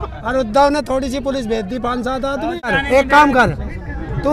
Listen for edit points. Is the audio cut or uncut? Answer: cut